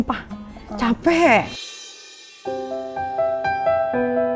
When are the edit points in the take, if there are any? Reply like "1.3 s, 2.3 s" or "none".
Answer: none